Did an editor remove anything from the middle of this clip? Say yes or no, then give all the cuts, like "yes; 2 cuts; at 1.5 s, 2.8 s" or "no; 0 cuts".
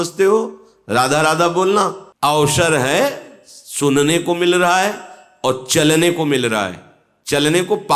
yes; 1 cut; at 2.0 s